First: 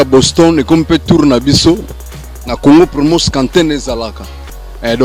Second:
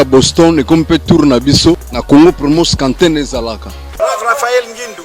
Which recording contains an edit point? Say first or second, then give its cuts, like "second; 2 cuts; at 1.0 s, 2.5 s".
second; 2 cuts; at 1.9 s, 3.9 s